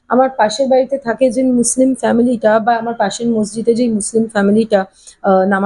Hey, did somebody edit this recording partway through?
no; 0 cuts

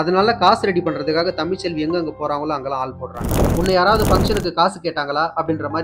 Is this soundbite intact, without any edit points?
no; 1 cut; at 3.4 s

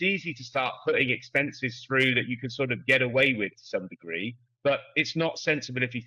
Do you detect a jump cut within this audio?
no; 0 cuts

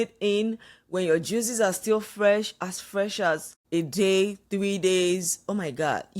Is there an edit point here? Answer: yes; 1 cut; at 3.5 s

